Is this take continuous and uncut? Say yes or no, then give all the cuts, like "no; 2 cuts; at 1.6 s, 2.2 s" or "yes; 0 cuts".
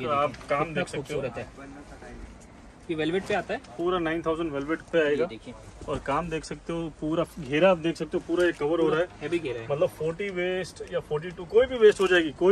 yes; 0 cuts